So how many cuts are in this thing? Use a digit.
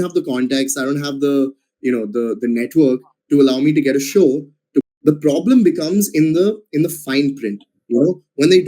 1